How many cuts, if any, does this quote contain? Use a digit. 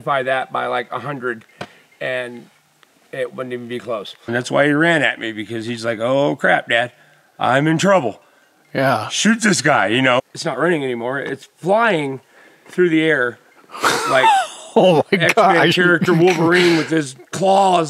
2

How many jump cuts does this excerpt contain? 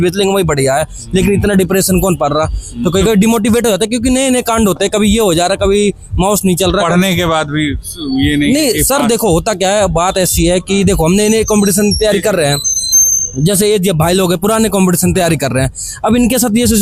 0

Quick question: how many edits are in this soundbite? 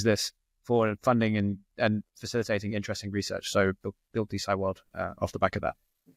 0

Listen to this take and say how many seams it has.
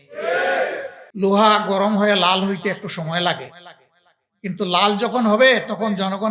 1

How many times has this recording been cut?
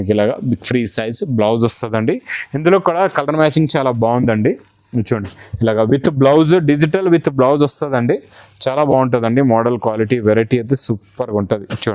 0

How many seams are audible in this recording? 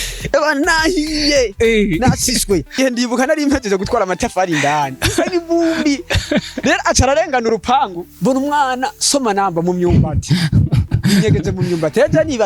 2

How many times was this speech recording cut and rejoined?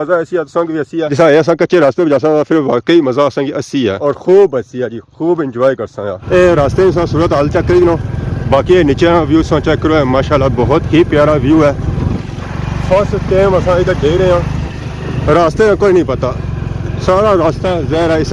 1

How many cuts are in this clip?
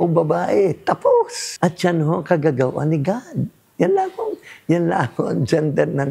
1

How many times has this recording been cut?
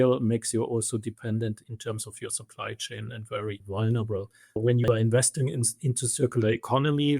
3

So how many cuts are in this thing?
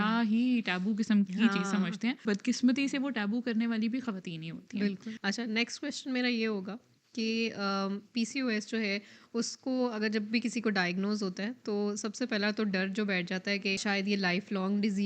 3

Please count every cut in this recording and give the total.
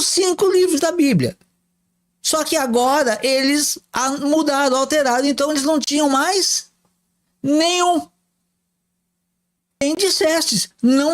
1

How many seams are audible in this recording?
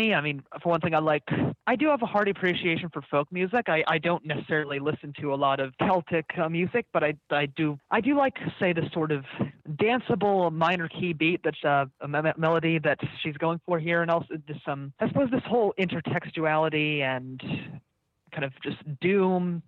5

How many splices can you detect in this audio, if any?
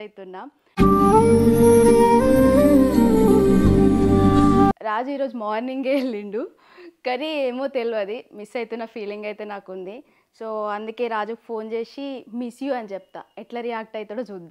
0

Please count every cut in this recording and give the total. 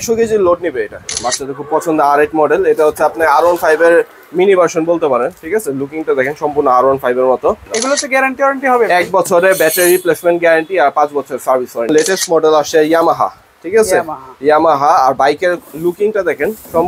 3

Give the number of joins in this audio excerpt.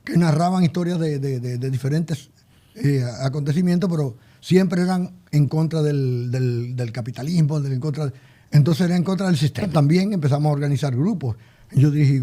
1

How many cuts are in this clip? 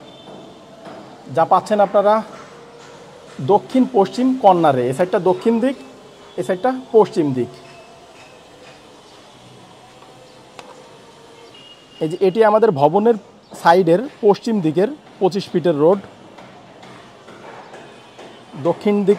0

